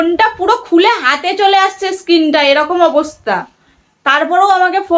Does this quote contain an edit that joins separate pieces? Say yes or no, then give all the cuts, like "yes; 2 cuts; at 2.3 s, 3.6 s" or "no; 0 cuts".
no; 0 cuts